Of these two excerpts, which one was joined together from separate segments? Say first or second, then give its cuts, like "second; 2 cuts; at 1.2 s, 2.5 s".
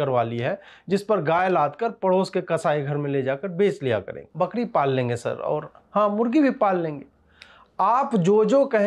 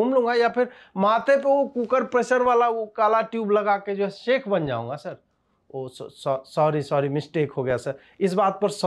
first; 1 cut; at 4.2 s